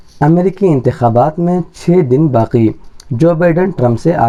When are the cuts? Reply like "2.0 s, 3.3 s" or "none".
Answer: none